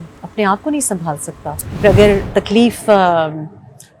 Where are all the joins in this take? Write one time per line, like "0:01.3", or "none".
0:01.8